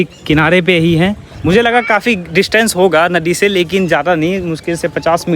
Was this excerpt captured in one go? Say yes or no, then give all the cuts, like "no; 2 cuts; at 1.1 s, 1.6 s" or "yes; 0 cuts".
yes; 0 cuts